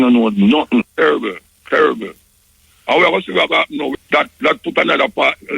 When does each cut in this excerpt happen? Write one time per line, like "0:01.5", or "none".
0:00.9
0:04.0